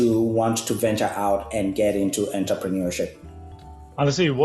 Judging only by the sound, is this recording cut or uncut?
uncut